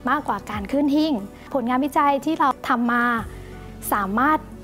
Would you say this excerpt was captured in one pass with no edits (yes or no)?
no